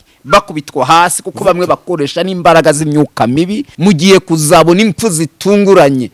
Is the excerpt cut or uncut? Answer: cut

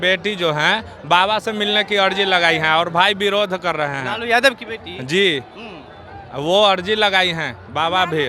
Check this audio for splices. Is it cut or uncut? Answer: uncut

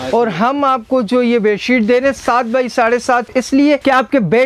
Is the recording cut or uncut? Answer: cut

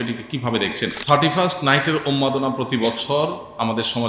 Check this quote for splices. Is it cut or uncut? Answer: cut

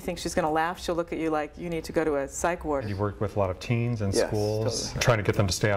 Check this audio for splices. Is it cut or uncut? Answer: cut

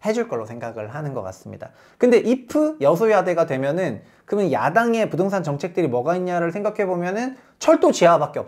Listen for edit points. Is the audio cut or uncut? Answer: uncut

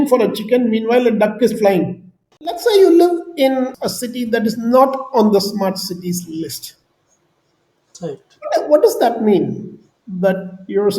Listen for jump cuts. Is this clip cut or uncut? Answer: cut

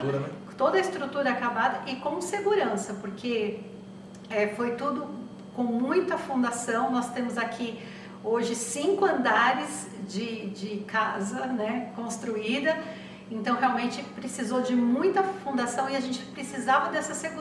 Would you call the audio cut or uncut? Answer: uncut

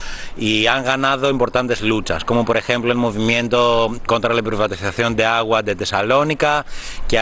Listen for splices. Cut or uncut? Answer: uncut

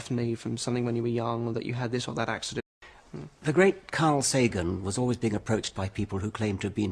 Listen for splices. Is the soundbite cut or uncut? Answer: uncut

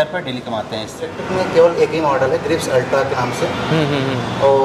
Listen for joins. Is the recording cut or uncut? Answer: cut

